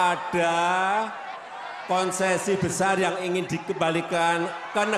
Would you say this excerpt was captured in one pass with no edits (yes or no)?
yes